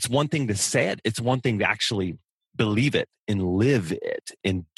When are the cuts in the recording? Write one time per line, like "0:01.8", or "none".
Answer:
none